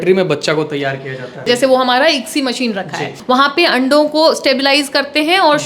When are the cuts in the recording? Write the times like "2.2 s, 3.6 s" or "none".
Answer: 1.4 s, 3.1 s